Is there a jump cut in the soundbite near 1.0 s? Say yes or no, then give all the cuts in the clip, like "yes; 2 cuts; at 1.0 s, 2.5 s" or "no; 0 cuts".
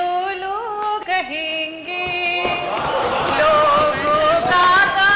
yes; 1 cut; at 1.0 s